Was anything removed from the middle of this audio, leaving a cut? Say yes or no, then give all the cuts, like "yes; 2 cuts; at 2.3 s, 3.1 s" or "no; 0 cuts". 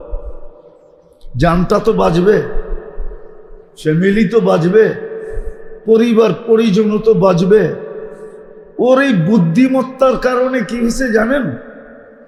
no; 0 cuts